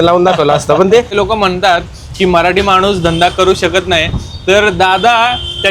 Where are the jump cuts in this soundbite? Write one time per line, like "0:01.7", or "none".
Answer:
0:01.1